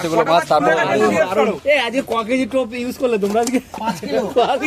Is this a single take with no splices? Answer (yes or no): yes